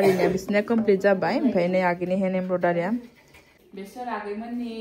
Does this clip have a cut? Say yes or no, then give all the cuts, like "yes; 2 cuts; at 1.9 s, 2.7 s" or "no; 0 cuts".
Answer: yes; 1 cut; at 3.6 s